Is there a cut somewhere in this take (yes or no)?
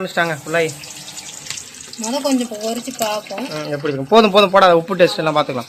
no